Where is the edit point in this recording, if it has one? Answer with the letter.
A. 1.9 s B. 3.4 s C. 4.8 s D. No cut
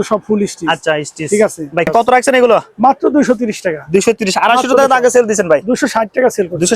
A